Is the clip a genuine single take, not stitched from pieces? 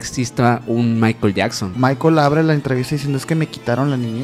no; 1 cut; at 1.8 s

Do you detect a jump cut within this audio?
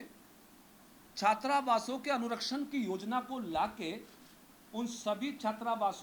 no; 0 cuts

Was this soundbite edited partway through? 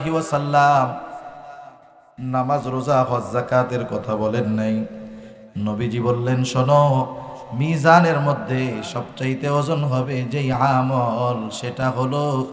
no; 0 cuts

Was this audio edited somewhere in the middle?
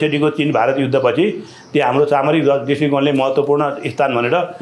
no; 0 cuts

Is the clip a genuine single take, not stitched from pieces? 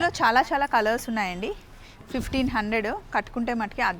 yes; 0 cuts

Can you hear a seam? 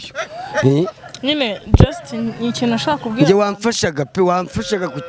no; 0 cuts

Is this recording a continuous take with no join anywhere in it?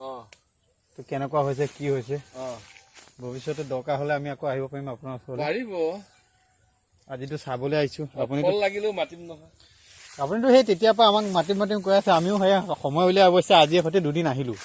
yes; 0 cuts

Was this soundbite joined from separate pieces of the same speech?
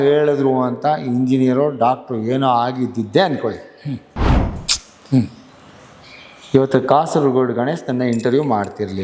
no; 0 cuts

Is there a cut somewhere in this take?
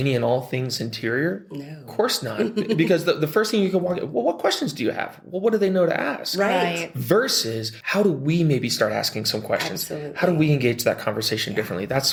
no; 0 cuts

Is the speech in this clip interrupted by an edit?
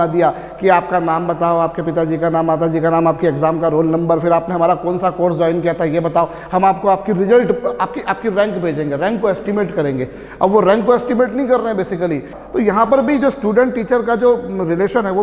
yes; 1 cut; at 12.3 s

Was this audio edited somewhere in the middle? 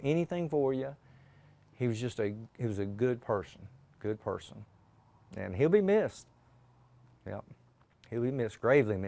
no; 0 cuts

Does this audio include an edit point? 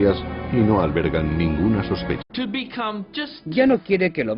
no; 0 cuts

